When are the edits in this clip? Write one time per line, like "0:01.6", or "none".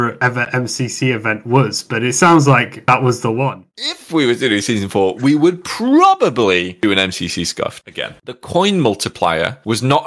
0:03.6
0:08.4